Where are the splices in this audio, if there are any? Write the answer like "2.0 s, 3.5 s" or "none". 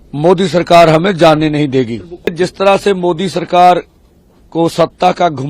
2.3 s